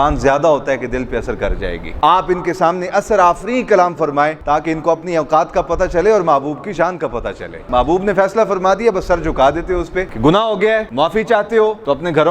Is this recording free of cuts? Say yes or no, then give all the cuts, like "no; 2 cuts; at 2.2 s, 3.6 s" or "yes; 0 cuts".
no; 4 cuts; at 1.9 s, 4.4 s, 7.5 s, 10.0 s